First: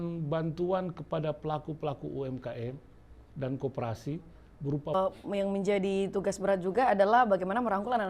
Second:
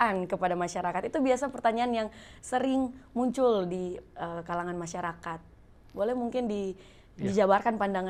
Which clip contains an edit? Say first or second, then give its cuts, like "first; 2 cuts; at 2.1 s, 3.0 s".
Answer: first; 1 cut; at 4.9 s